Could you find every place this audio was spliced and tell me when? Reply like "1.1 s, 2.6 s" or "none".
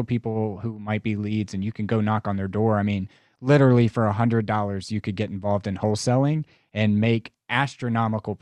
none